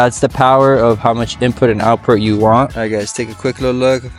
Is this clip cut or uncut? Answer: cut